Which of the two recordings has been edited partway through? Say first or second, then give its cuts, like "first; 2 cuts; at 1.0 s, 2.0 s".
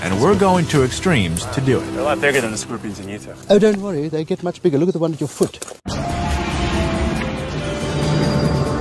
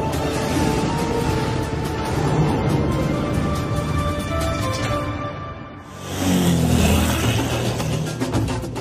first; 1 cut; at 3.9 s